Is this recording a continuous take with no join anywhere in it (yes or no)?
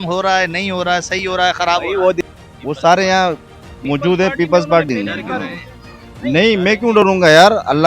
no